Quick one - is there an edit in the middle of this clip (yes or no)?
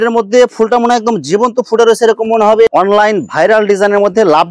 yes